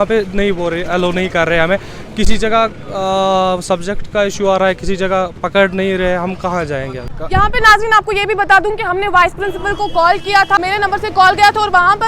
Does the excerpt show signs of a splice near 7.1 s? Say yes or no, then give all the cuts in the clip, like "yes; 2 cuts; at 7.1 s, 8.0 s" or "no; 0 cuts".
yes; 2 cuts; at 7.1 s, 10.6 s